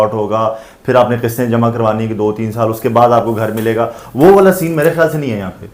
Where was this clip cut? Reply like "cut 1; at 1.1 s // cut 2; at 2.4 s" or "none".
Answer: none